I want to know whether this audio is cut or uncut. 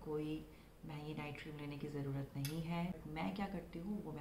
cut